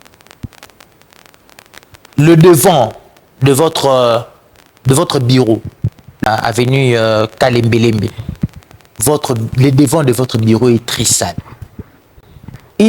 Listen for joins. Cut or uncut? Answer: cut